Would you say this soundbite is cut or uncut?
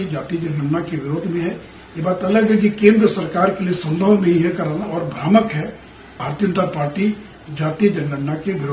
cut